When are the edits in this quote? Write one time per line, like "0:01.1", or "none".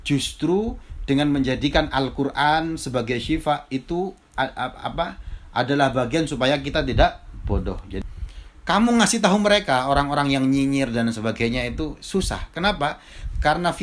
0:08.0